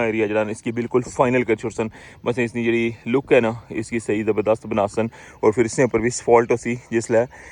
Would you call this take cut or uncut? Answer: uncut